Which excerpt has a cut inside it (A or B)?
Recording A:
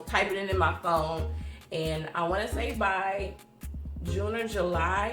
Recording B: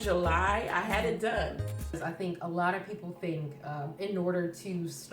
B